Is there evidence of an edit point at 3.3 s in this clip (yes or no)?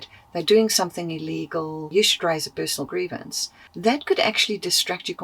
no